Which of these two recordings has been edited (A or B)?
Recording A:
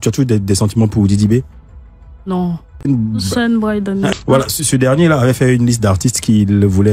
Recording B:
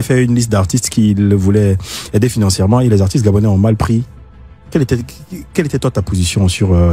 A